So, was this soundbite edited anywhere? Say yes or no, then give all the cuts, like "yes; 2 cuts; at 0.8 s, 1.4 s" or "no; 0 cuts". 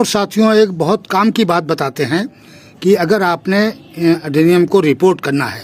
no; 0 cuts